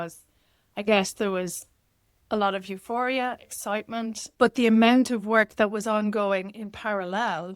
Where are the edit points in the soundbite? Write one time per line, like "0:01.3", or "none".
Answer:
0:04.2